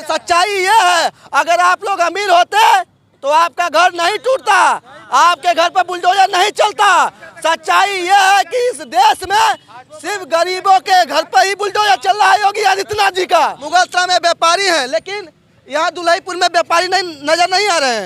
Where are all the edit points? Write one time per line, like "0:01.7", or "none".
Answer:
0:13.6